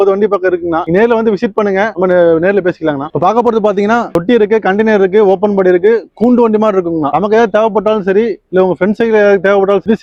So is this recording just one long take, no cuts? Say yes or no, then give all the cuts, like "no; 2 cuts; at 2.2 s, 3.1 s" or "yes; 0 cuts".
yes; 0 cuts